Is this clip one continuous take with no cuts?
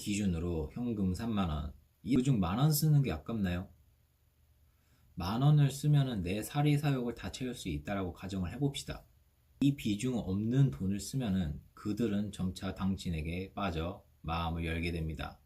no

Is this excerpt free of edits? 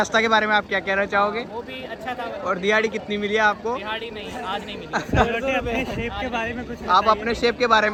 yes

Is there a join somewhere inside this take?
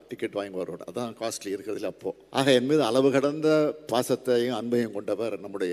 yes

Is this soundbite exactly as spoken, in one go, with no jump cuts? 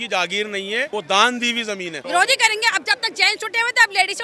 no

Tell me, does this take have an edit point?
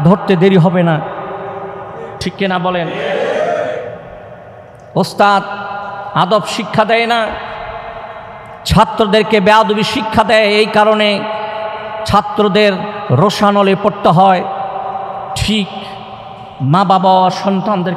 no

